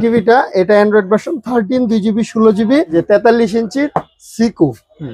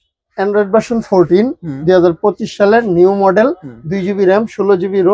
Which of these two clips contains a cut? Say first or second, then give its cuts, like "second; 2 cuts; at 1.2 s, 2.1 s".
first; 1 cut; at 2.9 s